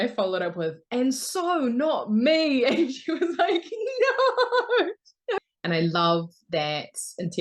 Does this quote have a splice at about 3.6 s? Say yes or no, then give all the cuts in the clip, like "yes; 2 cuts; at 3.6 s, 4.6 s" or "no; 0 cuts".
no; 1 cut; at 5.5 s